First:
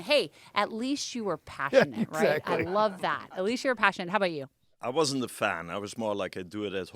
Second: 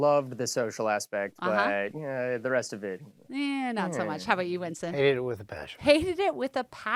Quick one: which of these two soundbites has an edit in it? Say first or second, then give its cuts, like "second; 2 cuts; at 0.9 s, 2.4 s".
first; 1 cut; at 4.7 s